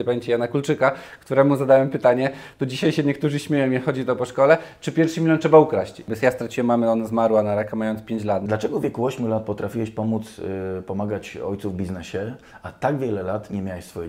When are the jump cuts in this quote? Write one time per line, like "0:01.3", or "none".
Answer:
0:06.1
0:08.4